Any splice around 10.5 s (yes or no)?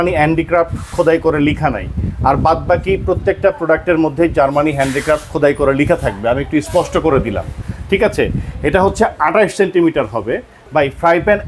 yes